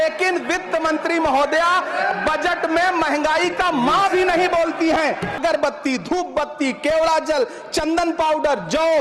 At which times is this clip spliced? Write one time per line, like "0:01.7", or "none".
0:05.4